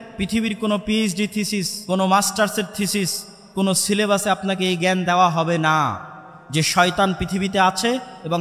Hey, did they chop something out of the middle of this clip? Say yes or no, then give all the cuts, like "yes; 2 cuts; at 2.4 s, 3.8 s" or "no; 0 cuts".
yes; 1 cut; at 1.7 s